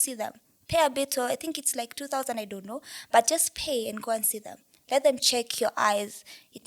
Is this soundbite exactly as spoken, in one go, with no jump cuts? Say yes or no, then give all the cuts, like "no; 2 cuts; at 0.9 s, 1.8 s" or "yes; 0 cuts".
yes; 0 cuts